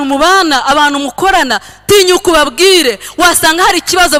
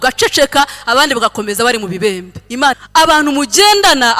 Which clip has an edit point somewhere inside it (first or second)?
second